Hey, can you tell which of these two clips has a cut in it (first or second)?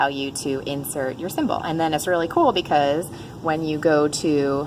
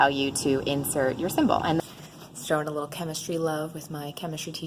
second